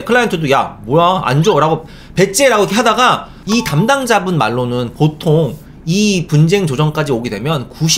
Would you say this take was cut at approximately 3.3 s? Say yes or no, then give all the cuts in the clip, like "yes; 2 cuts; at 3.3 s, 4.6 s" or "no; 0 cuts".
yes; 1 cut; at 3.3 s